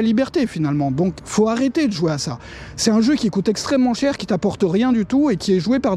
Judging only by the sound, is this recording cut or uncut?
uncut